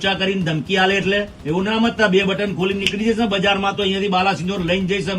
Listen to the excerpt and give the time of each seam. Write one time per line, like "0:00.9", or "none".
0:01.4